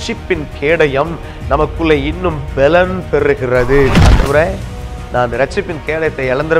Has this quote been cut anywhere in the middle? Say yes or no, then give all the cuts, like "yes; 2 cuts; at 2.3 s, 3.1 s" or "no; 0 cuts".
yes; 1 cut; at 4.0 s